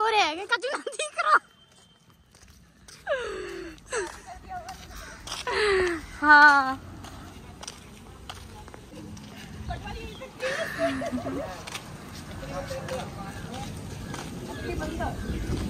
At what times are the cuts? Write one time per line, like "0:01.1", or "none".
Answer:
none

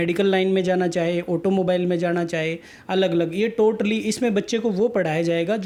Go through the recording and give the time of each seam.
none

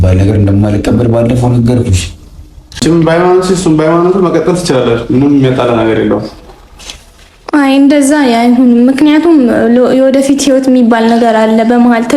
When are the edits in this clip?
0:02.8

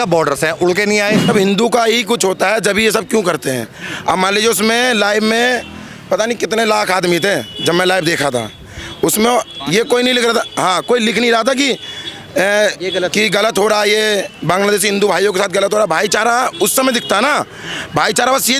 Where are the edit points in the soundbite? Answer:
0:01.3

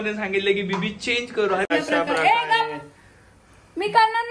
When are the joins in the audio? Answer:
0:01.7

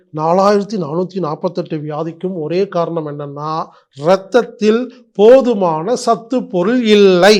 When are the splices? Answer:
none

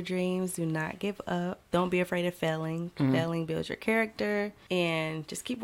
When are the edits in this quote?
0:01.6
0:04.6

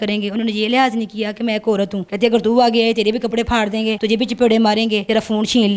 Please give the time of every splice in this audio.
0:04.0
0:05.0

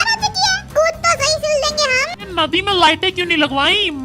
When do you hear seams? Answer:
0:02.1

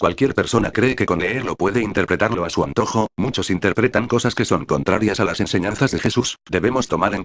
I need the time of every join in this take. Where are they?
0:05.0

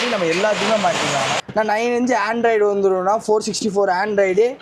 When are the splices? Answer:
0:01.4

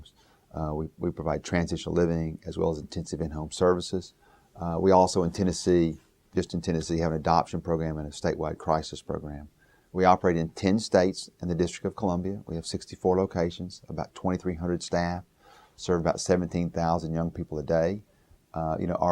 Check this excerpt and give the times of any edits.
0:12.2

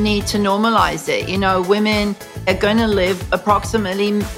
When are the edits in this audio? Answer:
0:02.5

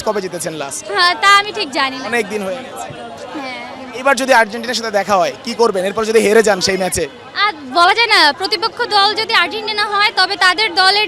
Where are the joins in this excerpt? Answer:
none

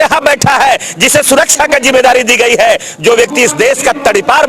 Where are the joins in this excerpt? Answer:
none

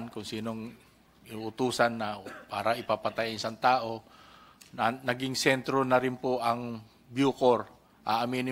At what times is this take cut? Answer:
none

